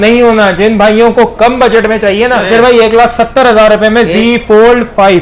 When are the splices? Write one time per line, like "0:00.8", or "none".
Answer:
0:02.4